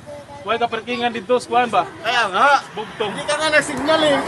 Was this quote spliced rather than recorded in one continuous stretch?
yes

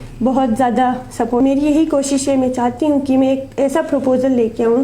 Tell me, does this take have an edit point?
yes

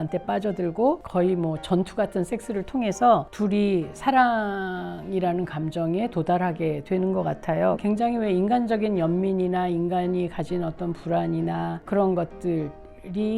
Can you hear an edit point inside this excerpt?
yes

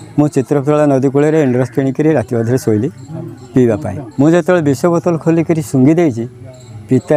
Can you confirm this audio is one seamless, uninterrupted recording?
no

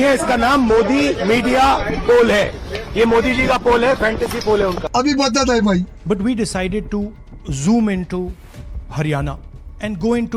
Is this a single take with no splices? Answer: yes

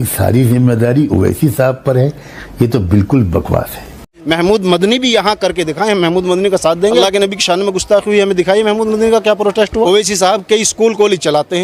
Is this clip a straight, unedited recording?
no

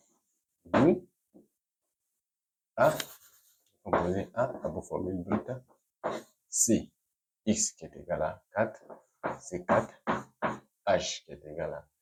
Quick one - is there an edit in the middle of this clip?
no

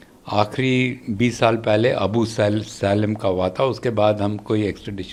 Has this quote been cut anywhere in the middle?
no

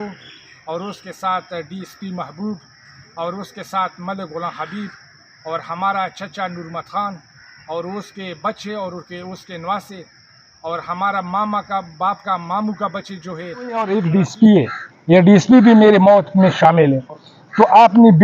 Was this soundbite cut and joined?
yes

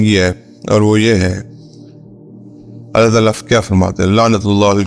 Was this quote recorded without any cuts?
yes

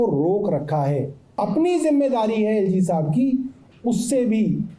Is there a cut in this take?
yes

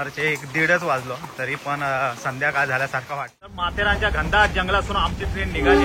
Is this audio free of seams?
no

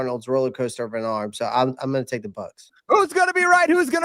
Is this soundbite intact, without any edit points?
no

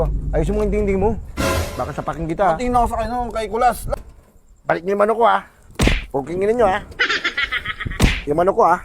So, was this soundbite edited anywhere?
yes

